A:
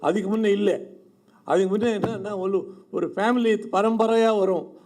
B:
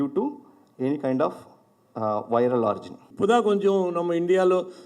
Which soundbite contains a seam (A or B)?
B